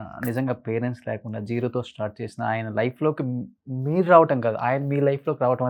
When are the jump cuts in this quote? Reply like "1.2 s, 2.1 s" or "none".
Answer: none